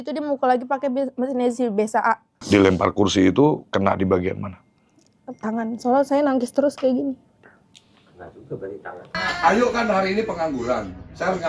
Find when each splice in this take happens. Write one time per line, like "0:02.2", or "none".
0:02.4
0:09.1

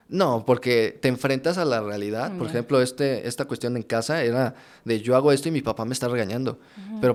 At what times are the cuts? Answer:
none

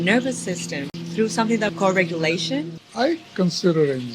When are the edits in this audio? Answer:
0:00.9
0:01.7
0:02.8

